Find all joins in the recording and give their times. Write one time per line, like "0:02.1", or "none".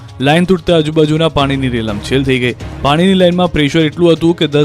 0:02.9